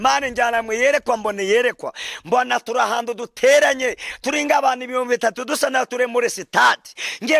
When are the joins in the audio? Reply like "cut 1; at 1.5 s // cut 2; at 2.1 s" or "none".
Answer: none